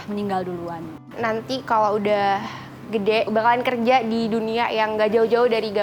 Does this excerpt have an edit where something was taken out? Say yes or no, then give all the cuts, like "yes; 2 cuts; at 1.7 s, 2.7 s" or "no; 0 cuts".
yes; 1 cut; at 1.0 s